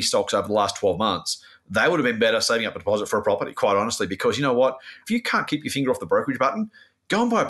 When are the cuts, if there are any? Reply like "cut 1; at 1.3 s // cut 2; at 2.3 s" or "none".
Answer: cut 1; at 5.0 s